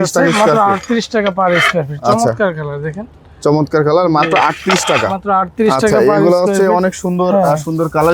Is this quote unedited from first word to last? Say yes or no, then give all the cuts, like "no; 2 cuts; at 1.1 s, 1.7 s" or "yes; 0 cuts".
yes; 0 cuts